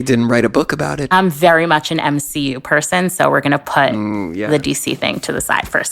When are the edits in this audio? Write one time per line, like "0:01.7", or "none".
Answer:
0:01.0